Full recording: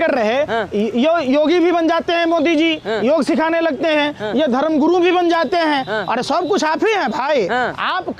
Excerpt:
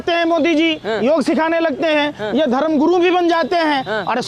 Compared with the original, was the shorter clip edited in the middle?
no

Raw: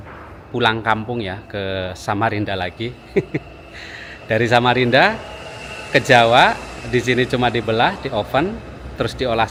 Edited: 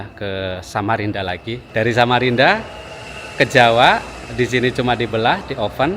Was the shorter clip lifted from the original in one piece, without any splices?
no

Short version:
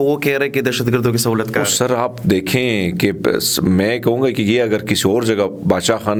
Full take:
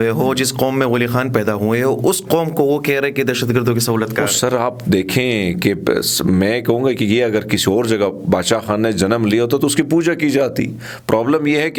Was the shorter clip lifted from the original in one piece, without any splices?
yes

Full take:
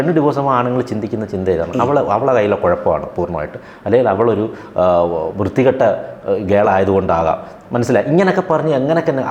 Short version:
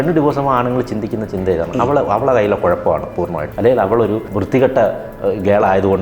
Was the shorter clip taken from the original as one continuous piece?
no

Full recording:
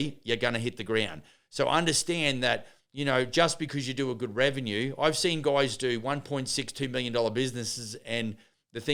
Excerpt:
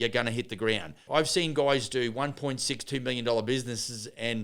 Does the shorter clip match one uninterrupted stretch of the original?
no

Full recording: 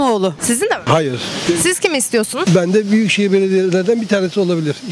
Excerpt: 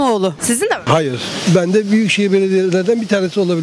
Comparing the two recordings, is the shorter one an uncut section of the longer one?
no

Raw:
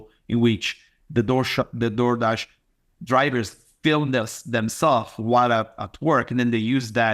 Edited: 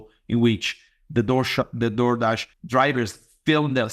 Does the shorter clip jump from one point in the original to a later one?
yes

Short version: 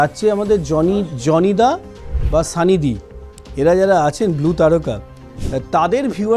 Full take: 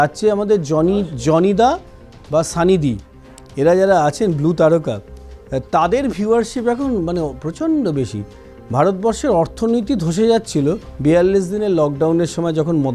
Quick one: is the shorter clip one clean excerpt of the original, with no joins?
yes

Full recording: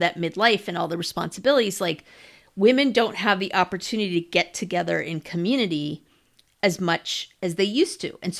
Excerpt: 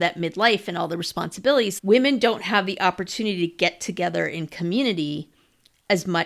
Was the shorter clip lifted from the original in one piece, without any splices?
no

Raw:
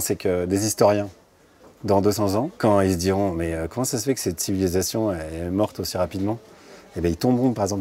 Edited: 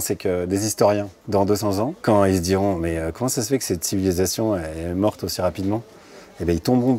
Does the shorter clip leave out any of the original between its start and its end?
yes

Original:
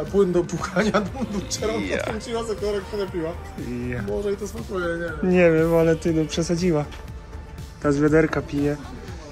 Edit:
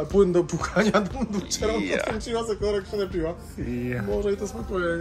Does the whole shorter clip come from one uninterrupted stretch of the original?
yes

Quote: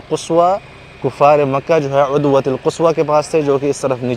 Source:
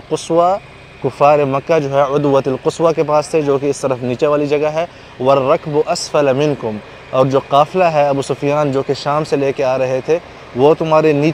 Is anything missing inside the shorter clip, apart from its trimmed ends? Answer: no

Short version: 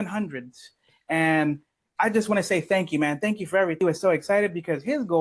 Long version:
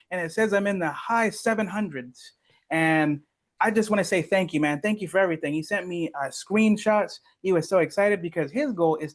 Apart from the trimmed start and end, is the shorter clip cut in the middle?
yes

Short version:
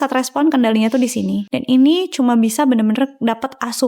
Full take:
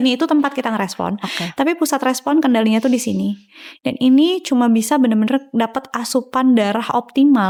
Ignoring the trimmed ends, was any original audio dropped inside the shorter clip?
yes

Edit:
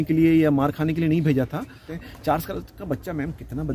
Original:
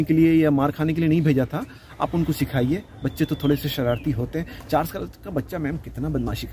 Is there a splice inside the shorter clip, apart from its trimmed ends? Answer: yes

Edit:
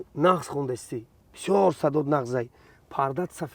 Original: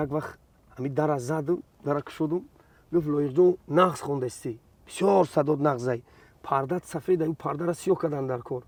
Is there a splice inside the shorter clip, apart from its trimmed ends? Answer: no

